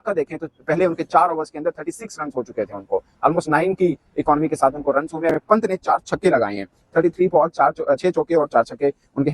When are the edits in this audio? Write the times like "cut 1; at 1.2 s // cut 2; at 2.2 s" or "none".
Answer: cut 1; at 5.3 s